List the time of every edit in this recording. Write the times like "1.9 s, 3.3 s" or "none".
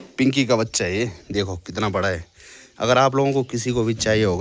none